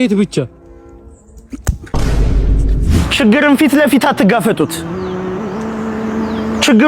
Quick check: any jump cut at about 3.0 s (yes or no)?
yes